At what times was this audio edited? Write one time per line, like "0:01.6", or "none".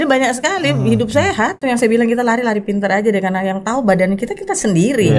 0:01.6